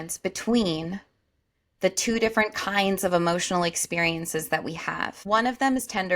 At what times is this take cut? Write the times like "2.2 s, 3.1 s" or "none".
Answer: 5.2 s